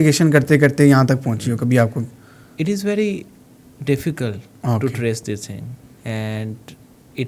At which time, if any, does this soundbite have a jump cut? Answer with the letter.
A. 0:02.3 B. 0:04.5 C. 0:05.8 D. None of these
D